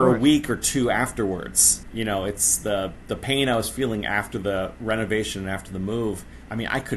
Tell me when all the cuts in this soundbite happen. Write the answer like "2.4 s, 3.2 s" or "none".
none